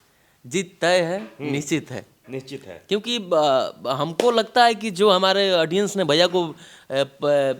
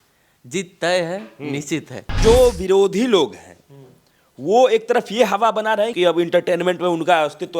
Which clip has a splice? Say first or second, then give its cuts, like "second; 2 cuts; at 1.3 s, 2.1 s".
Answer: second; 2 cuts; at 2.2 s, 5.9 s